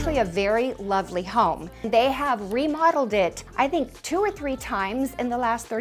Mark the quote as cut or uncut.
cut